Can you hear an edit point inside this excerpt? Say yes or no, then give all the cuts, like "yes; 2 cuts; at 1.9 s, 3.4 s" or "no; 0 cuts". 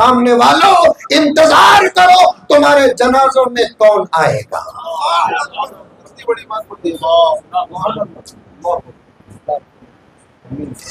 no; 0 cuts